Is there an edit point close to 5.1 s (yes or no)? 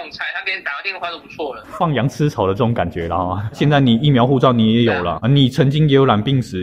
yes